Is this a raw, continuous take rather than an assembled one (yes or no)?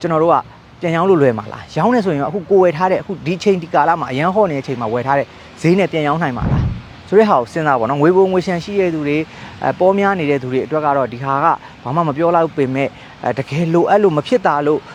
yes